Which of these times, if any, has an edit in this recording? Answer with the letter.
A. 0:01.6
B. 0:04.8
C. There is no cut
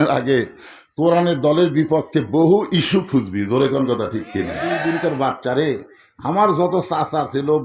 B